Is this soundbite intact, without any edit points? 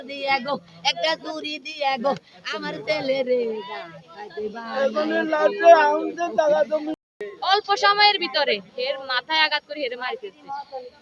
no; 1 cut; at 7.1 s

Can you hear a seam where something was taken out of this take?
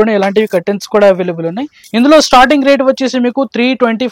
yes; 1 cut; at 1.8 s

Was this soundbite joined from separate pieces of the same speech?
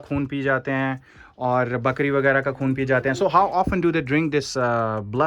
no; 0 cuts

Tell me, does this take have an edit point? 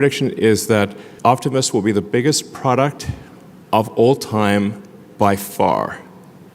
yes; 1 cut; at 1.0 s

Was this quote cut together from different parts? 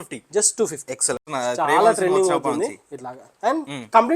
yes; 1 cut; at 1.3 s

